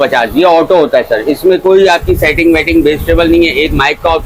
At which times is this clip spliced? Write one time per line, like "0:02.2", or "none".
none

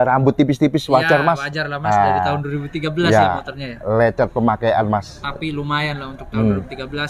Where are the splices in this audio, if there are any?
none

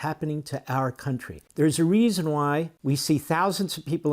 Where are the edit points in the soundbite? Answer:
0:01.4
0:02.7

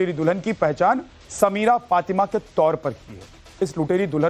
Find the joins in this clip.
0:02.1

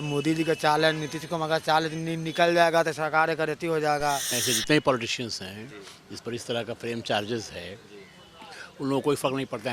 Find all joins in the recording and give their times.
0:04.3

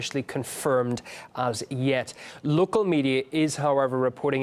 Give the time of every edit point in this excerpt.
0:01.1

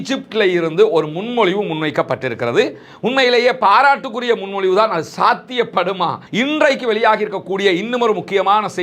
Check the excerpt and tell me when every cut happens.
0:06.2

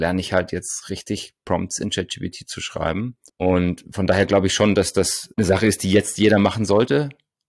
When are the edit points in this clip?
none

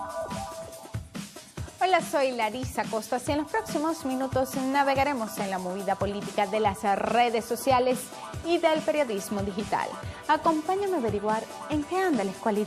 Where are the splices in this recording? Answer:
none

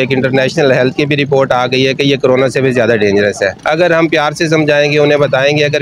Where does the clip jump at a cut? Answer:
0:03.6

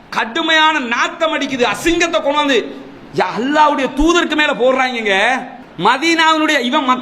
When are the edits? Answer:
0:05.6

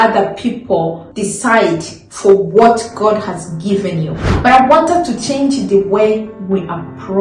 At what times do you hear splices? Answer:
0:01.1
0:04.2

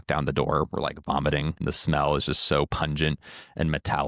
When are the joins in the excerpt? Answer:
0:01.6

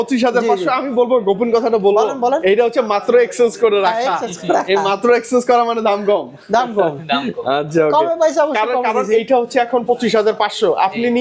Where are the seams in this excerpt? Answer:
none

